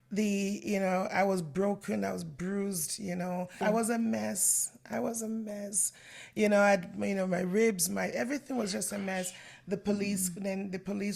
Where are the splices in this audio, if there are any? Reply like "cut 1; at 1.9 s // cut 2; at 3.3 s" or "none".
cut 1; at 3.5 s